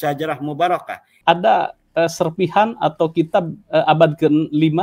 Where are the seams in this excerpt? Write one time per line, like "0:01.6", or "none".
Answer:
0:01.1

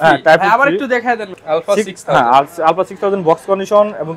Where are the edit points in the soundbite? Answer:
0:01.3

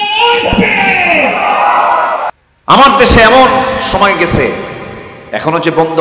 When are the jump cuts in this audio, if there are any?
0:02.3

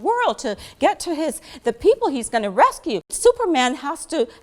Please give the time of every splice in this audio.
0:03.1

